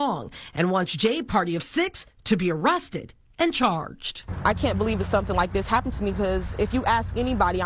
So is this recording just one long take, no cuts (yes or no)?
no